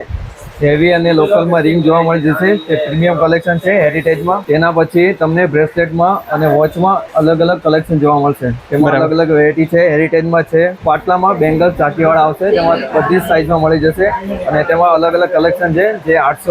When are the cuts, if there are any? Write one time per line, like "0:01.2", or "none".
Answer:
0:04.4
0:07.0
0:10.8

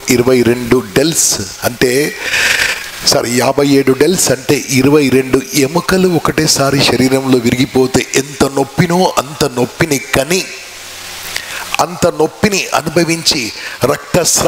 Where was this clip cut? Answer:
none

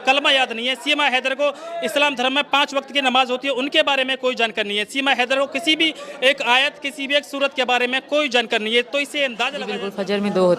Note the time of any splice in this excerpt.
0:09.5

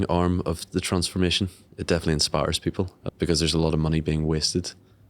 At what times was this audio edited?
0:03.0

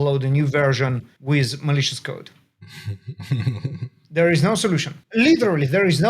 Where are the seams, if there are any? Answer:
0:01.1
0:05.0

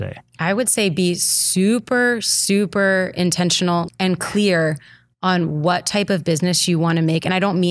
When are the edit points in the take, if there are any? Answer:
0:03.9

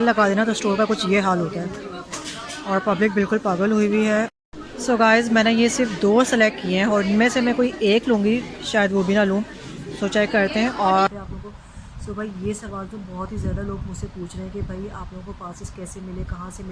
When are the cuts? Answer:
0:04.3
0:11.1

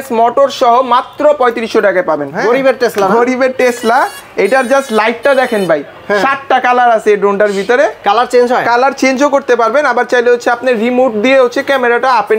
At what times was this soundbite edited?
0:02.3

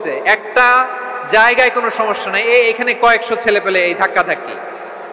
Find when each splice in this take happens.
none

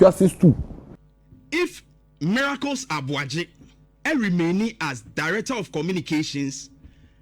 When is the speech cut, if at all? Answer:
0:01.0

